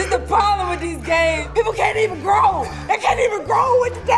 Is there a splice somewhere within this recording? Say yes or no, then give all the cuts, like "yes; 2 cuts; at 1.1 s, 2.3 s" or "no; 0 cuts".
yes; 1 cut; at 1.4 s